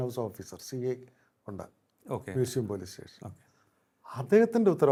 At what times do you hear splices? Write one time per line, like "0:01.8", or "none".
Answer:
none

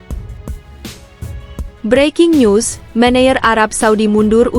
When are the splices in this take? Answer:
0:01.6

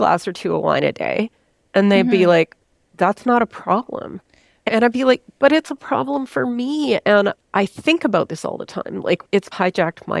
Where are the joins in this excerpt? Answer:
0:09.2

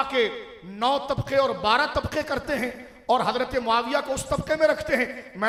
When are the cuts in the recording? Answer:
none

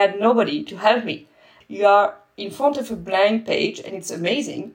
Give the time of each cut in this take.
0:01.5

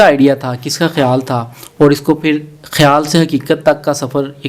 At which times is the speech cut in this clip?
none

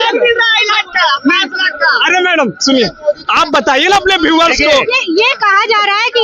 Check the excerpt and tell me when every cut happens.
none

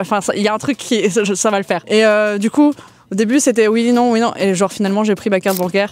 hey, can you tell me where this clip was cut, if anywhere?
0:01.8

